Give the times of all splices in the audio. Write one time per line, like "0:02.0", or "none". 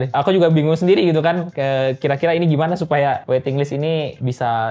none